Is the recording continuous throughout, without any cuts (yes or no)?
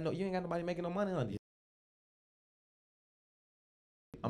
yes